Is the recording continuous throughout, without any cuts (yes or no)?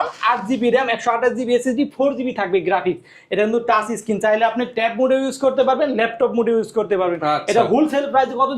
yes